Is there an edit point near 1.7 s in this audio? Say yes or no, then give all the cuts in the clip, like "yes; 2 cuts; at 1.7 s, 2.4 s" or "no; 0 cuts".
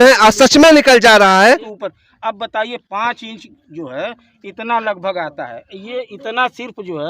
yes; 1 cut; at 1.7 s